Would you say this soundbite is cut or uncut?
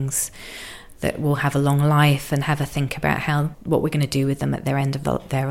uncut